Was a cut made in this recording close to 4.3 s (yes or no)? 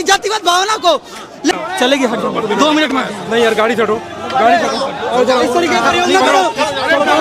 no